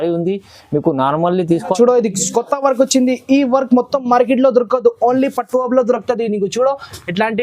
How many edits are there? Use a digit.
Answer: 1